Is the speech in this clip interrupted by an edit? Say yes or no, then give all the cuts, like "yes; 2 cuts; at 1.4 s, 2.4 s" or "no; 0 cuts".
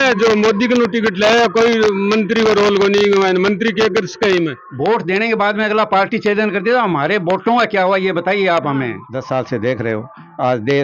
yes; 2 cuts; at 4.6 s, 9.0 s